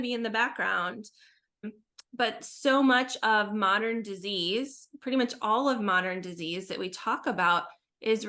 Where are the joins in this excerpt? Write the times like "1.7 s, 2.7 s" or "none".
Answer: 1.7 s